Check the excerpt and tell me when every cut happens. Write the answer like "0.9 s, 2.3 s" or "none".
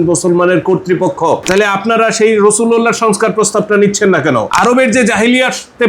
1.4 s